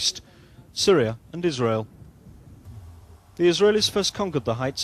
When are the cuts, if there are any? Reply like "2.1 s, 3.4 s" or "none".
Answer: 2.1 s